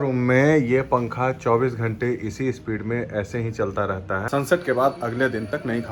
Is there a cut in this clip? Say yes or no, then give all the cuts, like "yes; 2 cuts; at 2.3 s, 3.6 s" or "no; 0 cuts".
yes; 1 cut; at 4.2 s